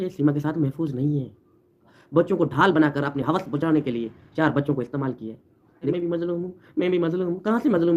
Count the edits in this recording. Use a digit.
2